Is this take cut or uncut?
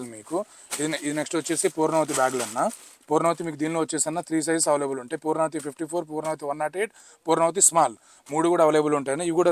uncut